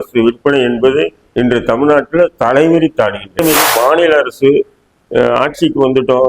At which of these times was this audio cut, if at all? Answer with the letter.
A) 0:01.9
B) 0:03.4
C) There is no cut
B